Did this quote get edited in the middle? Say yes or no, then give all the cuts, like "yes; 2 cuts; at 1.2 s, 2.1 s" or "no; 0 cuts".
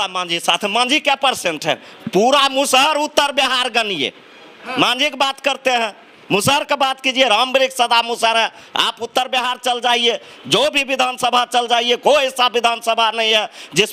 no; 0 cuts